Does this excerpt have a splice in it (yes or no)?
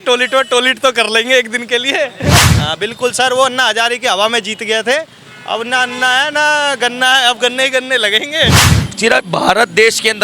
yes